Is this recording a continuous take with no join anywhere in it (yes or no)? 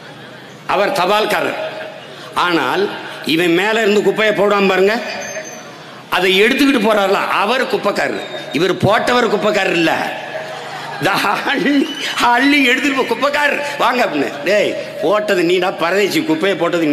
yes